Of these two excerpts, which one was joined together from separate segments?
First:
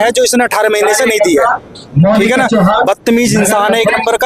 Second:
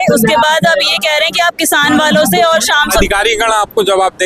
second; 1 cut; at 3.0 s

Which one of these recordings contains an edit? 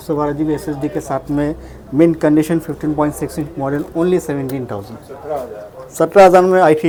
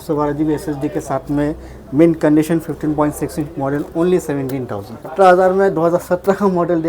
second; 1 cut; at 5.1 s

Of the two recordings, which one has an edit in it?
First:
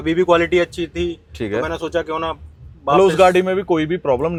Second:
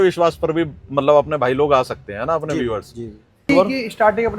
second; 1 cut; at 3.5 s

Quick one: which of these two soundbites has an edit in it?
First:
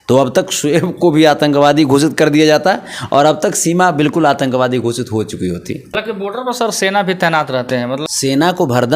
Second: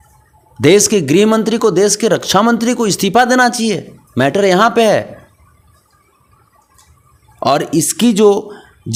first; 2 cuts; at 5.9 s, 8.0 s

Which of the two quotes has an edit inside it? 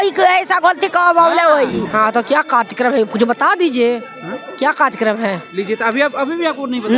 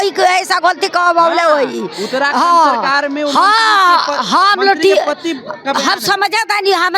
first; 1 cut; at 1.9 s

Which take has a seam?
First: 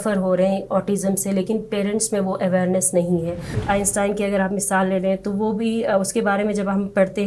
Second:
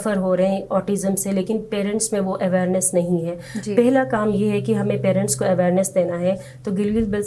first; 1 cut; at 3.6 s

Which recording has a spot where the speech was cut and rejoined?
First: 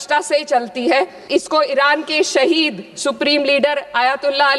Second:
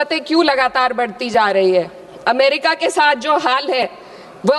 first; 1 cut; at 1.3 s

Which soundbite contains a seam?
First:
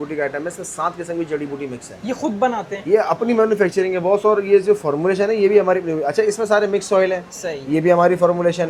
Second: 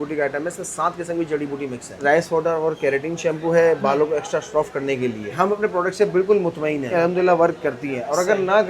second; 3 cuts; at 2.0 s, 5.3 s, 6.9 s

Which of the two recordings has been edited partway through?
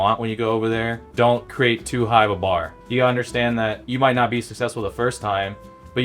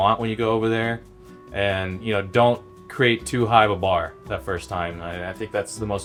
first; 3 cuts; at 1.4 s, 2.8 s, 3.8 s

